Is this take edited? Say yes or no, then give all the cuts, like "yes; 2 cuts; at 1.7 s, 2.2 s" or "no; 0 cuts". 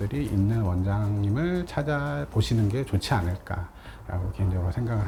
no; 0 cuts